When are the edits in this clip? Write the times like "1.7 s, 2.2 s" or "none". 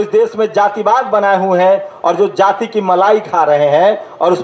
none